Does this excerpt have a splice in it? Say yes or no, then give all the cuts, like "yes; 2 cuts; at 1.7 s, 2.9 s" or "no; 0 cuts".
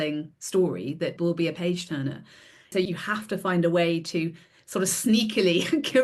yes; 2 cuts; at 1.1 s, 2.7 s